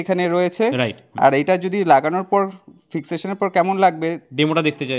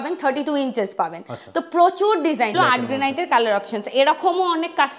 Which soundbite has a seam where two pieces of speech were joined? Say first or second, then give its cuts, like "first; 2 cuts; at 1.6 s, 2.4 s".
second; 1 cut; at 2.5 s